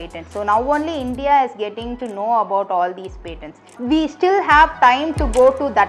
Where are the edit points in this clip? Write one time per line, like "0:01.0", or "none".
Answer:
0:03.8

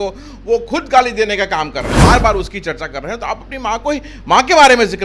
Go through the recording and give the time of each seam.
0:02.0

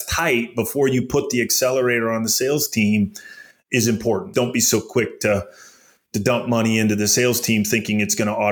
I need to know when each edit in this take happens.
0:04.3

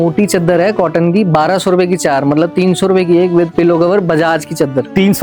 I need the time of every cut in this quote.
none

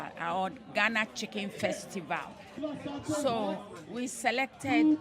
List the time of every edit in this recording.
0:02.6

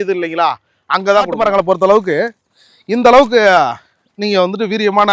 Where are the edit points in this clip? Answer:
0:01.4

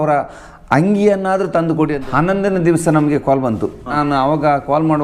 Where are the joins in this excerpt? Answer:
0:02.0
0:03.9

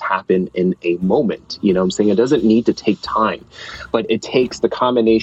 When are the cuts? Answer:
none

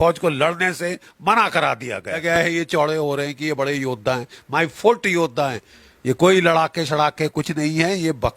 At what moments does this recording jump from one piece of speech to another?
0:02.2
0:05.7

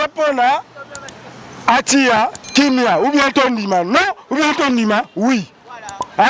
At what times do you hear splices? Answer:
none

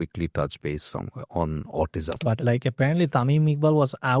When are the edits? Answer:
0:02.2

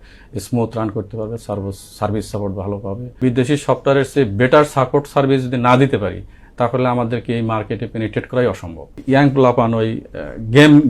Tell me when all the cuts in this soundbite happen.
0:03.2
0:09.0

